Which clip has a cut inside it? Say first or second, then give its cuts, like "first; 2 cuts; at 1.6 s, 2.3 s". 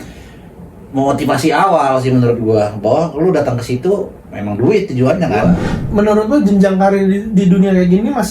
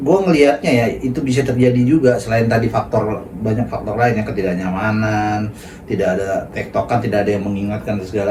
first; 1 cut; at 5.3 s